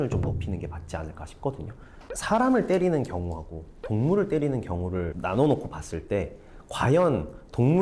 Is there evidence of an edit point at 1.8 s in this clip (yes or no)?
yes